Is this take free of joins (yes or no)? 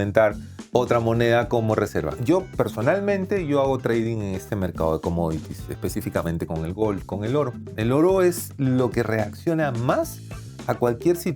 no